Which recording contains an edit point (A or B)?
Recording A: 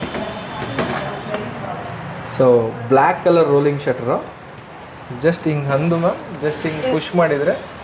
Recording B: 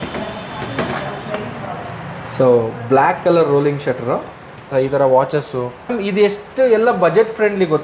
B